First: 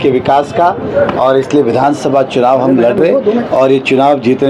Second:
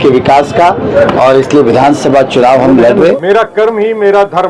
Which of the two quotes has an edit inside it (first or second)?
second